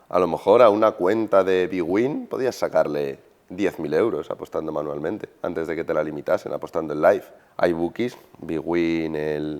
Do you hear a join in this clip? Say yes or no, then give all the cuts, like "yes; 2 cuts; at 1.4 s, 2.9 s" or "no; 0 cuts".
yes; 1 cut; at 7.4 s